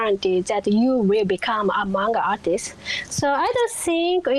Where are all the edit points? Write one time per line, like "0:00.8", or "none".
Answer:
none